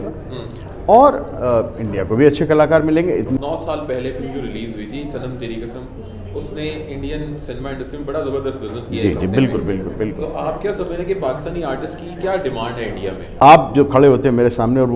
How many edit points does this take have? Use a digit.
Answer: 2